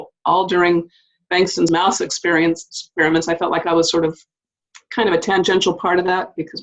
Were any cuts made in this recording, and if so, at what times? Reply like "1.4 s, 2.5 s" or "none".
1.7 s

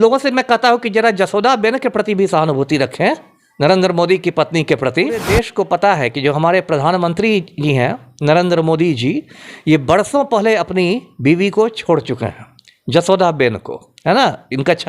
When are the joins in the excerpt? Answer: 5.2 s

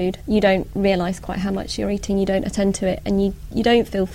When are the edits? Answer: none

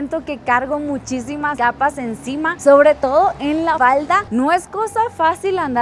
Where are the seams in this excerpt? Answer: 1.5 s, 3.8 s

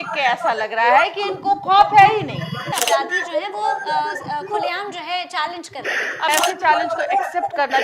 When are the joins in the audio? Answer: 2.6 s, 6.3 s

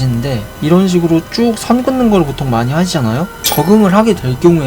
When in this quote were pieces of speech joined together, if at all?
3.4 s

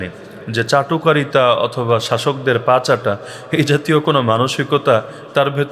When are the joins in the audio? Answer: none

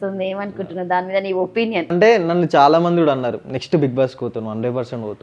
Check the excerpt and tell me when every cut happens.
1.9 s

